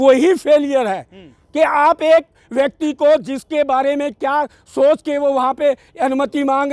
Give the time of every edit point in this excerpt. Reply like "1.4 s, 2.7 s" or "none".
none